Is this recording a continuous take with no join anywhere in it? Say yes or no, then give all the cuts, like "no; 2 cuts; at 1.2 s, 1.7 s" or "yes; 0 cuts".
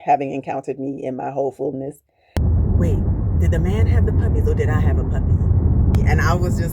no; 2 cuts; at 2.3 s, 6.0 s